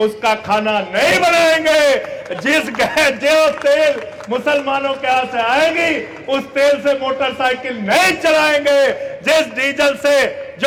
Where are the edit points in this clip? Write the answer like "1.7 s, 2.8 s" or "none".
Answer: none